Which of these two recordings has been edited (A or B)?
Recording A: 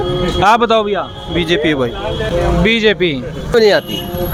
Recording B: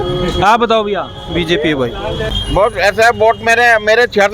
B